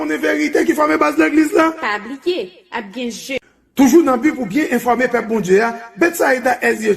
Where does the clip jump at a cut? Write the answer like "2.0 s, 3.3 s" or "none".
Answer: 3.4 s